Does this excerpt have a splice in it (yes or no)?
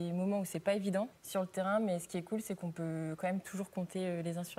yes